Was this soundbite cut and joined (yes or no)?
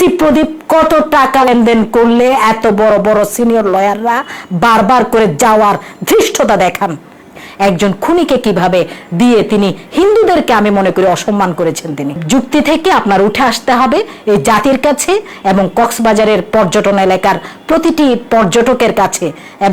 yes